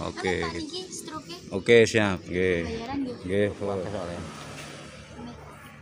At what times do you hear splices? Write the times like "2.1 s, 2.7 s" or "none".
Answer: 4.0 s